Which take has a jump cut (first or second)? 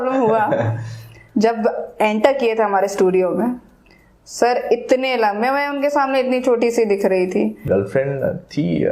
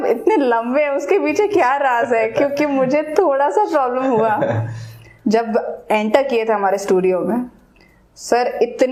first